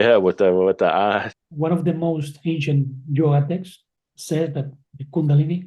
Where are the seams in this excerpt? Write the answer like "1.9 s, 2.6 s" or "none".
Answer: 1.4 s